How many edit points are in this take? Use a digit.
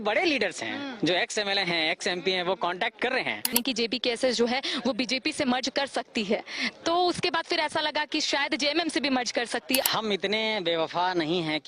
2